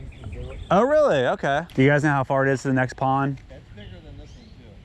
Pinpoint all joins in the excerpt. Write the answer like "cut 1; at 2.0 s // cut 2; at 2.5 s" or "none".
cut 1; at 1.7 s // cut 2; at 3.5 s